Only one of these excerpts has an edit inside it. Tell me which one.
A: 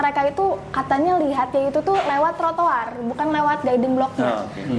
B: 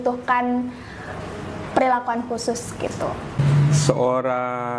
B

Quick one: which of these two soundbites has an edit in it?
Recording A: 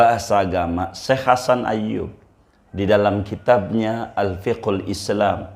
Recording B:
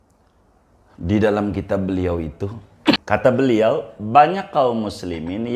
B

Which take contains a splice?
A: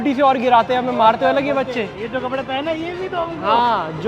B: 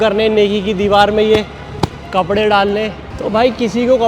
B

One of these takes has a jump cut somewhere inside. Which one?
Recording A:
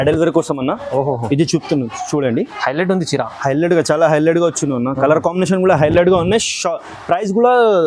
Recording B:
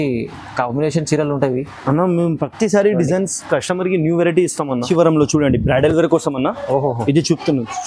B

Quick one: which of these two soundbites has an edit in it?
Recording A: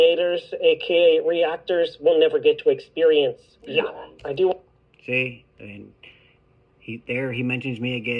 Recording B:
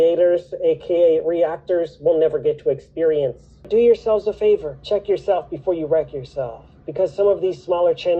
B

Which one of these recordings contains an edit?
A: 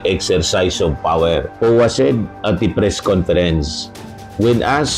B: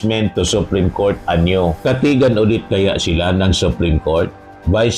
A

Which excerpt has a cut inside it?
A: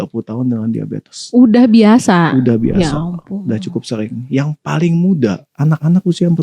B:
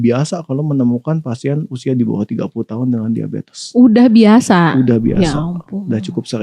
A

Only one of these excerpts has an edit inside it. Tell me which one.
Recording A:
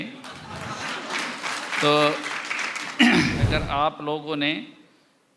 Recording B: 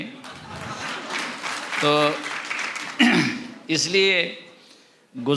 A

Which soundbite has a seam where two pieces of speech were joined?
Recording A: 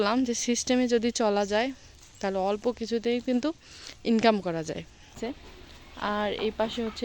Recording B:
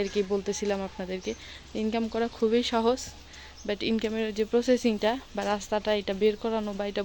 A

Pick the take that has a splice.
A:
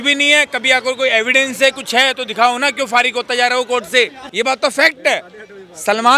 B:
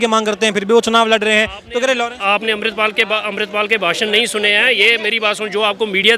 A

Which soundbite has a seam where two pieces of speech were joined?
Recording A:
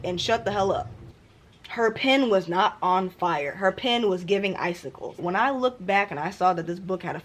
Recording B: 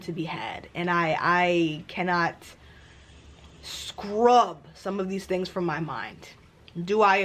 A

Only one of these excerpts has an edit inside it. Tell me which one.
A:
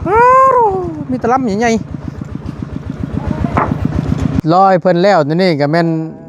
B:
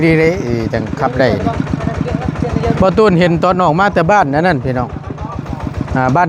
A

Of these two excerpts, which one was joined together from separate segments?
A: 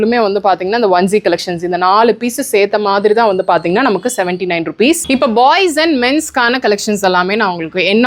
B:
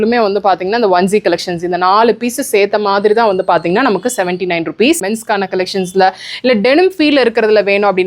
B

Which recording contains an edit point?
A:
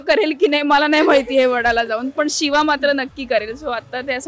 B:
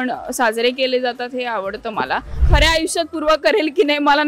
B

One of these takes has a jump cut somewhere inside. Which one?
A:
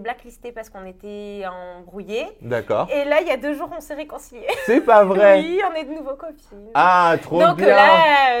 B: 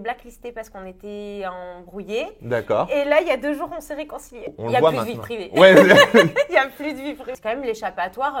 B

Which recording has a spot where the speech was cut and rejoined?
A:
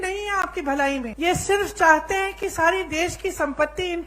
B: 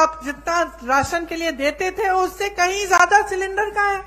A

